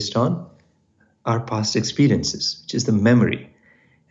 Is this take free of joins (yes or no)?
yes